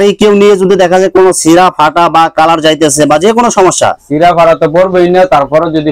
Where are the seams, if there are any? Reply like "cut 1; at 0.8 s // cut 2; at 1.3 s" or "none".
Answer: none